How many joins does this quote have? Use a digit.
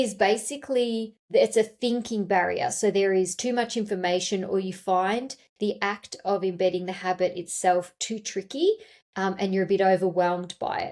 1